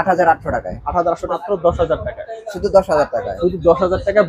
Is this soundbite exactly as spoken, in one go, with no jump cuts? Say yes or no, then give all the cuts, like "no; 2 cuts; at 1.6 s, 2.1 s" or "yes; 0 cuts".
no; 1 cut; at 1.3 s